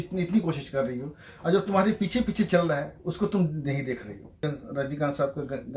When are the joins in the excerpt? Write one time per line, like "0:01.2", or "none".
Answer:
0:04.4